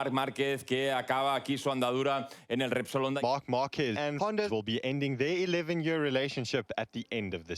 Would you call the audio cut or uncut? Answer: cut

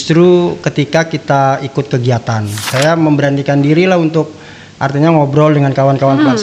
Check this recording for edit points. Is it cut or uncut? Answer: cut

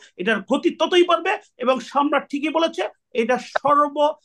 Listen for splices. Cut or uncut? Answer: uncut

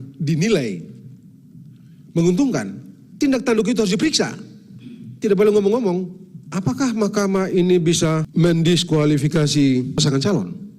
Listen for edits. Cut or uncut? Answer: cut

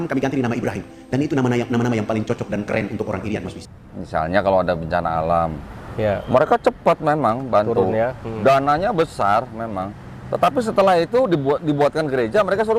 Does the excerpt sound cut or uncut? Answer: cut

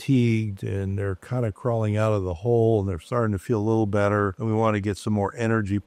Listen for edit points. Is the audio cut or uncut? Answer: uncut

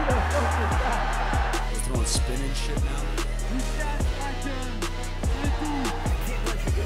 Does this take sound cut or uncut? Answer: uncut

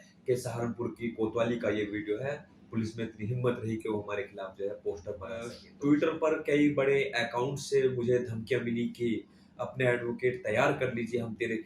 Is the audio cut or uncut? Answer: cut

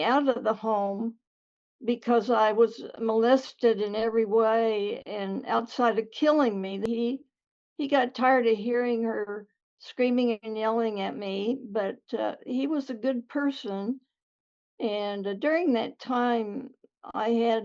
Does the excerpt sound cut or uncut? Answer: cut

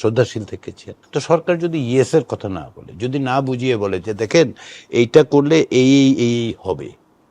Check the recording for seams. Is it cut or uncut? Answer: cut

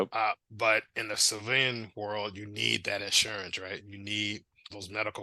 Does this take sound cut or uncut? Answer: uncut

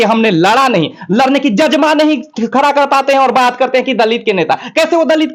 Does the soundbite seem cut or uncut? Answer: uncut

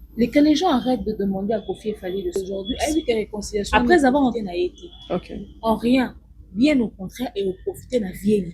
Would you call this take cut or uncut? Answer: cut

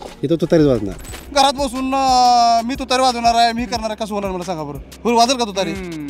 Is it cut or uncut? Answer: cut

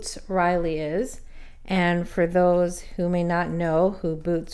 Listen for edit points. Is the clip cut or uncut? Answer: uncut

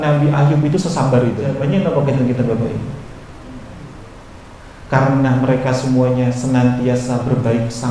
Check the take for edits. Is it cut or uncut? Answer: cut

